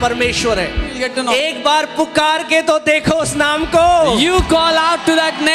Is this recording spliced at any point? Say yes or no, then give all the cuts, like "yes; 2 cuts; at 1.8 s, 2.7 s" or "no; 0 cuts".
yes; 1 cut; at 1.0 s